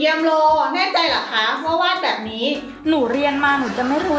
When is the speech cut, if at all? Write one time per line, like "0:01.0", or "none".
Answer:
none